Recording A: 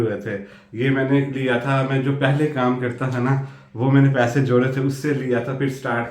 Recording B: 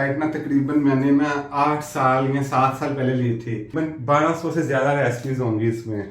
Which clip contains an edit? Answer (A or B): B